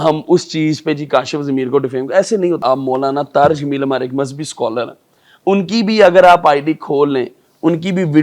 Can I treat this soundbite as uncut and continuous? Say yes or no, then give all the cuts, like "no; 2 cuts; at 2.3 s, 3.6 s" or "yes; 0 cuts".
no; 1 cut; at 2.6 s